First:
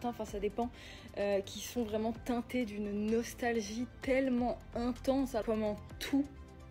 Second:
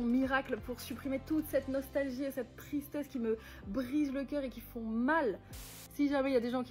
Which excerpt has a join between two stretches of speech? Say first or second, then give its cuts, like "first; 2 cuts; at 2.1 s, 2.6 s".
second; 1 cut; at 5.5 s